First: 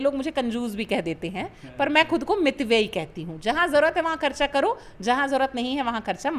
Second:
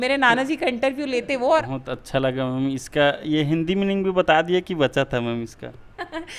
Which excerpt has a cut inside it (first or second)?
second